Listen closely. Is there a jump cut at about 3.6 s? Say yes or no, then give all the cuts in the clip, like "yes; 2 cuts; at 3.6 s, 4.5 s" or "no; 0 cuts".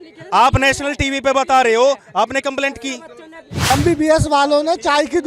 yes; 1 cut; at 3.6 s